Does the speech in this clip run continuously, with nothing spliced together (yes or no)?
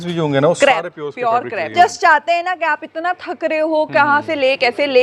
no